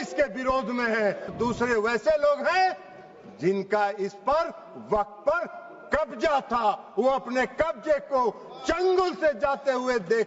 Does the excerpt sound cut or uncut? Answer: cut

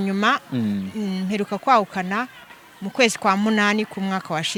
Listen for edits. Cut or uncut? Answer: uncut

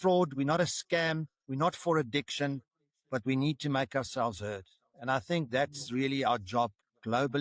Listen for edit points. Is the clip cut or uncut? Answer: uncut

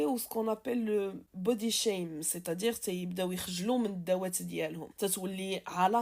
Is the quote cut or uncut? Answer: cut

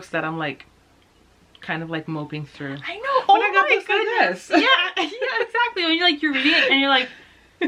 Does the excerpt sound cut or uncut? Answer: uncut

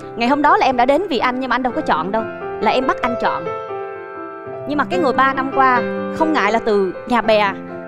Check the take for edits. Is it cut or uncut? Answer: uncut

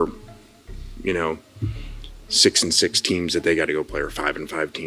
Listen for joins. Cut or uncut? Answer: uncut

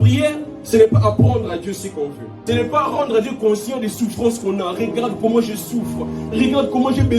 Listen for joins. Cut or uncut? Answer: cut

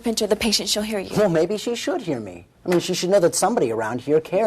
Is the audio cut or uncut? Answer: cut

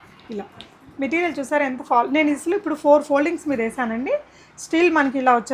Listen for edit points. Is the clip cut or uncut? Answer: uncut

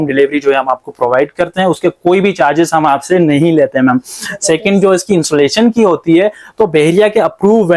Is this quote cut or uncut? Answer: uncut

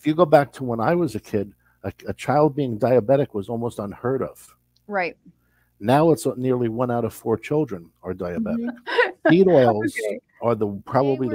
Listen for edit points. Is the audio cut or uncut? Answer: cut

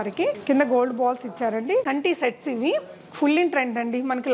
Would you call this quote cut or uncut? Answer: cut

